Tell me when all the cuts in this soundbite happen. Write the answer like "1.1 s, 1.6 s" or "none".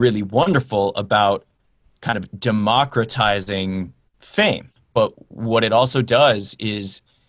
4.7 s